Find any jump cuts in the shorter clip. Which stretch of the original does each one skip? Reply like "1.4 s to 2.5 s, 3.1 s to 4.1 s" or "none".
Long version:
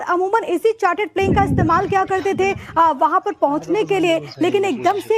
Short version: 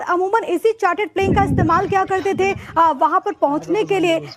none